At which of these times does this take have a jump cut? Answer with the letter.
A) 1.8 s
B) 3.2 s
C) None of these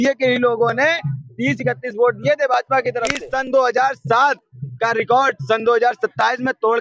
B